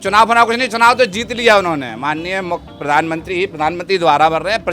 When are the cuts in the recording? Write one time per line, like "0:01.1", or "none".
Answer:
none